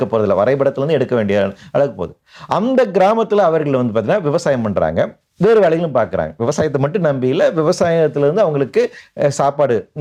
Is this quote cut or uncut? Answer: uncut